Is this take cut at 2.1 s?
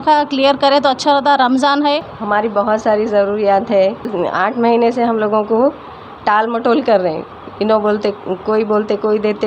yes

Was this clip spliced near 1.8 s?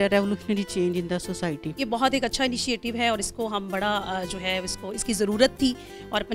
yes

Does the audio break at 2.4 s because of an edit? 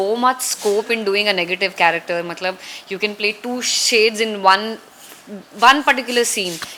no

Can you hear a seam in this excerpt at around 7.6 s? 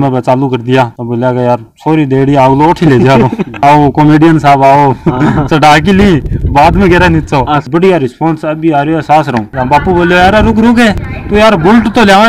yes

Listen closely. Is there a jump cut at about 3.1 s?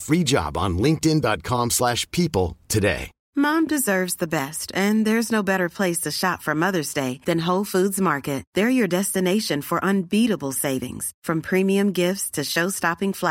yes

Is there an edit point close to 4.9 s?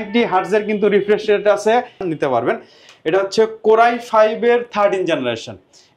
no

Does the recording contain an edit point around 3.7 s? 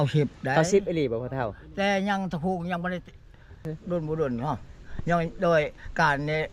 yes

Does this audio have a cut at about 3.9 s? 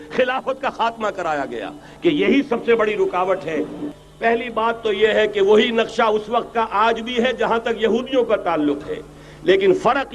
yes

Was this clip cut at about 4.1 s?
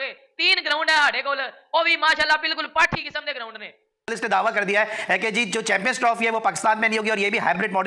yes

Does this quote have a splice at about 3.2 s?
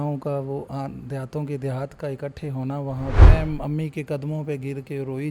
yes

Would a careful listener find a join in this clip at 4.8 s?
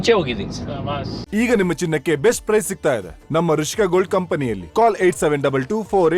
no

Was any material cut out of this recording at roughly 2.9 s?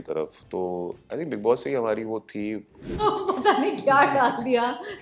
yes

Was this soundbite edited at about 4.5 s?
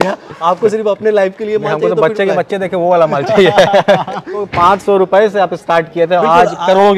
yes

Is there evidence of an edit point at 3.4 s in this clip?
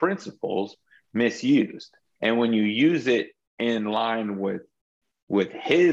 no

